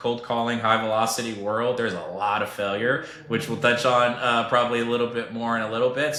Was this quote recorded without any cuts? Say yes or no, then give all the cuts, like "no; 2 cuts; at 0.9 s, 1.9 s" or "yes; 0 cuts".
yes; 0 cuts